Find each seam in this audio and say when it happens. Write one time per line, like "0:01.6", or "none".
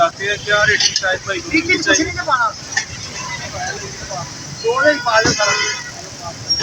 none